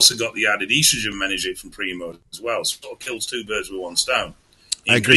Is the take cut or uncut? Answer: cut